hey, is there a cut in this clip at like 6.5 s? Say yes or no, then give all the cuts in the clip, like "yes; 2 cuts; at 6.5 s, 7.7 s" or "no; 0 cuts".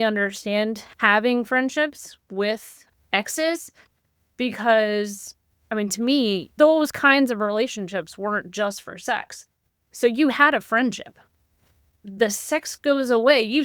yes; 1 cut; at 6.5 s